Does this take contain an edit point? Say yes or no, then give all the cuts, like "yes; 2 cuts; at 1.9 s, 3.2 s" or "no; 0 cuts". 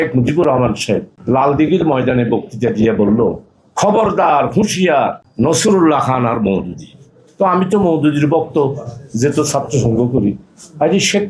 yes; 2 cuts; at 1.1 s, 5.2 s